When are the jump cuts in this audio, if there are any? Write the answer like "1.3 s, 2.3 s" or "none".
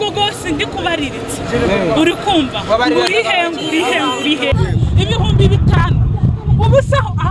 4.5 s

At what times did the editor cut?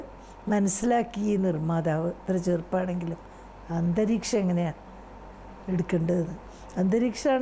none

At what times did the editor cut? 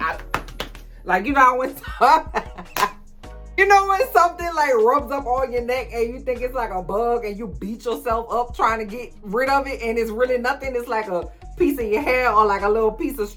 none

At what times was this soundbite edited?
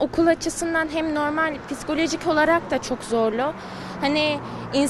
none

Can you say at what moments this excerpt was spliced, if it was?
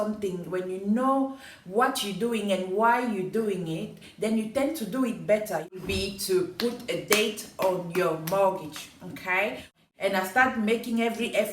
5.8 s, 9.9 s

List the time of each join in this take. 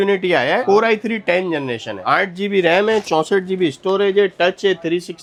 none

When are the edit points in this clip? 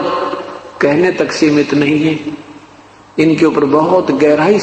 none

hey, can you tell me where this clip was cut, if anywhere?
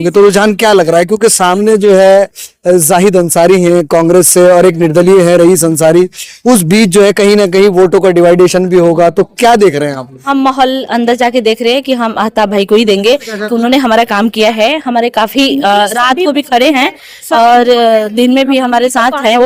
none

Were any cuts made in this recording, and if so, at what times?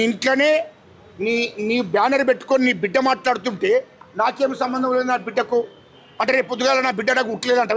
none

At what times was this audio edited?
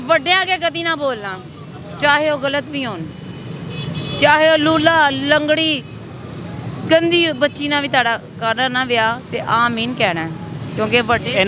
none

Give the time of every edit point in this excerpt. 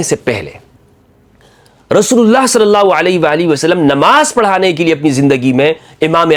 none

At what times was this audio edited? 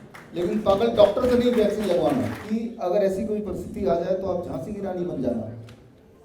2.4 s

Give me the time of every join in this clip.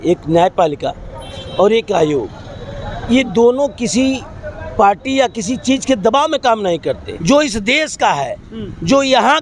7.1 s

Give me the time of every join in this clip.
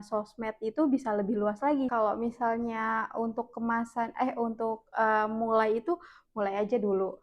1.9 s

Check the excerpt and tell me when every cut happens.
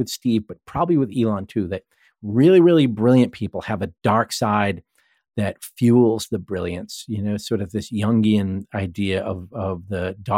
none

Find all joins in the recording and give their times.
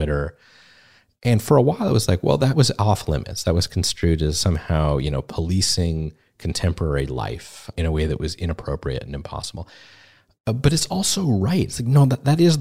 2.5 s, 4.4 s, 7.7 s

